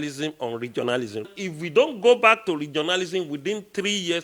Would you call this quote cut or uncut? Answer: cut